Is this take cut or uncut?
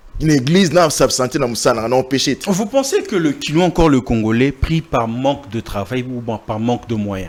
uncut